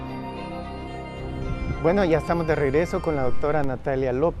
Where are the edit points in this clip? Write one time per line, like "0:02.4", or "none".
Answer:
0:01.2